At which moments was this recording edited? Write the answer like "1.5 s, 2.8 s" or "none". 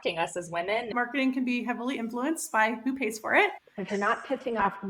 0.9 s, 3.8 s